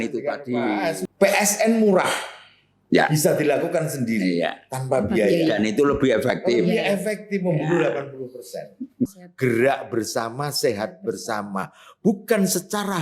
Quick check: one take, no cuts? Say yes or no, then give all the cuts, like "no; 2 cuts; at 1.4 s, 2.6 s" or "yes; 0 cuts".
no; 2 cuts; at 1.0 s, 9.2 s